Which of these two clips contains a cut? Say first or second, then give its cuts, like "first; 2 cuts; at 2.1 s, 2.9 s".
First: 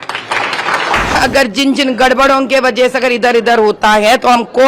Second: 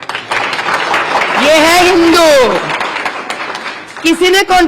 first; 1 cut; at 1.2 s